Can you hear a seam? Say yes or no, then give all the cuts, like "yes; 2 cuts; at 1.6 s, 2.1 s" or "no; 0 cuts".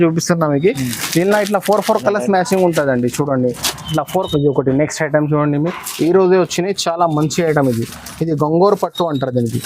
yes; 1 cut; at 4.1 s